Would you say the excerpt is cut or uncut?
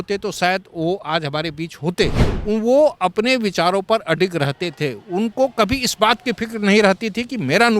cut